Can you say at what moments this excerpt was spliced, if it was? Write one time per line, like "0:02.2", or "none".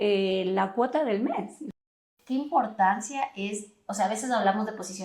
0:01.8